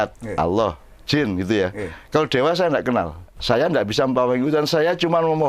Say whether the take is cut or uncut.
cut